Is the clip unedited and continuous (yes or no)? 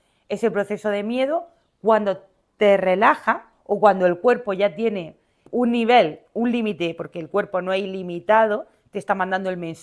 no